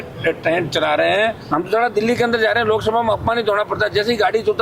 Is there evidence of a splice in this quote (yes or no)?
yes